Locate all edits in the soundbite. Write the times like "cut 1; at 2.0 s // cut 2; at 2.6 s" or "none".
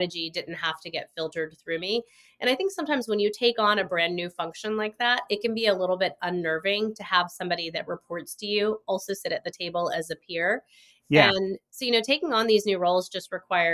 none